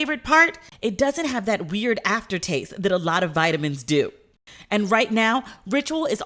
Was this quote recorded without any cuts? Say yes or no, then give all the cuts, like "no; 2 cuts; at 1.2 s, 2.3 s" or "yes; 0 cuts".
yes; 0 cuts